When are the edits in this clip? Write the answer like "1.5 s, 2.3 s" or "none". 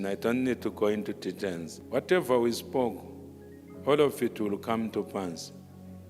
1.7 s